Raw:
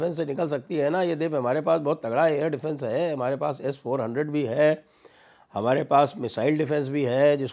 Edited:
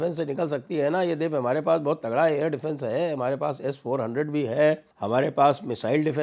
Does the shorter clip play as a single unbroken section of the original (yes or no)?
no